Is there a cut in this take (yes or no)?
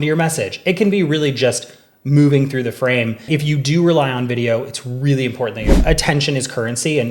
yes